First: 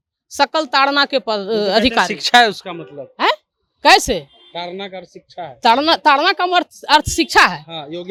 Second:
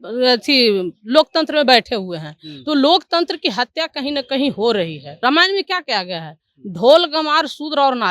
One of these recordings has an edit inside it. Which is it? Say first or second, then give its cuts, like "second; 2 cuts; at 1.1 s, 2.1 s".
second; 1 cut; at 5.2 s